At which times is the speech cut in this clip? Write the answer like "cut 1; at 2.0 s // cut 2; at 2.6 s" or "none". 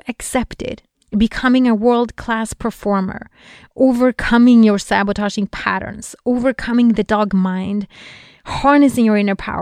cut 1; at 0.9 s